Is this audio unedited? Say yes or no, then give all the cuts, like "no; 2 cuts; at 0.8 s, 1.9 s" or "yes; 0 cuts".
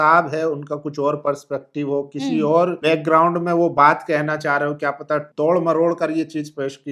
no; 2 cuts; at 2.8 s, 5.3 s